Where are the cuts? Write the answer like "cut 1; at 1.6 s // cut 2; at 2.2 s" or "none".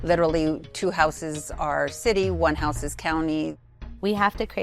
cut 1; at 3.7 s